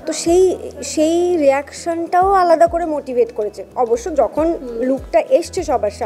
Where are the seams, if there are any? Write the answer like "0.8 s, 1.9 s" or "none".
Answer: none